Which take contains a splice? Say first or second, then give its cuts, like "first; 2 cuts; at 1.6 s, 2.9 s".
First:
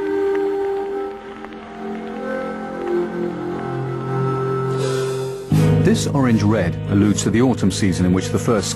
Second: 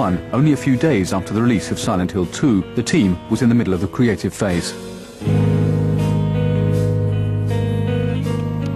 first; 1 cut; at 5.0 s